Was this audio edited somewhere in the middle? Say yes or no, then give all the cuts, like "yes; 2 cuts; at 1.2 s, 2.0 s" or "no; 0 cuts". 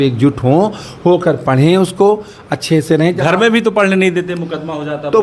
no; 0 cuts